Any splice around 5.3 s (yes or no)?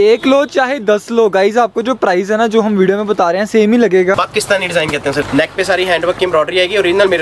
yes